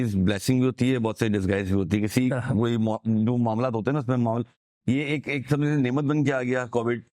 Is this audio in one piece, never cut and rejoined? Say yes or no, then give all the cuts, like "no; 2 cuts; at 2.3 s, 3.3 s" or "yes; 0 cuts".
yes; 0 cuts